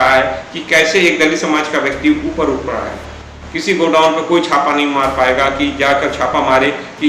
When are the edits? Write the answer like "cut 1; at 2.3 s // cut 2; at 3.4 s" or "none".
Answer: cut 1; at 3.2 s